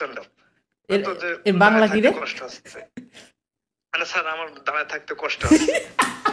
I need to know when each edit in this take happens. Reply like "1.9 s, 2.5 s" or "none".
none